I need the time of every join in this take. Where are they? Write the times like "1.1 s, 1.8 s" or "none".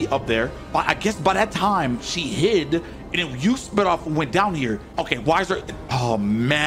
4.9 s